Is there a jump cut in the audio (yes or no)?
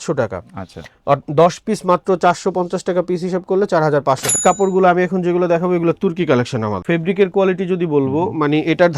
yes